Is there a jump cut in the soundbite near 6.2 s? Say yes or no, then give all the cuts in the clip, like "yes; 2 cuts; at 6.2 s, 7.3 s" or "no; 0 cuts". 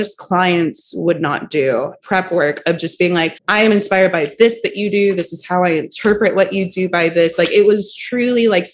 no; 2 cuts; at 2.0 s, 3.4 s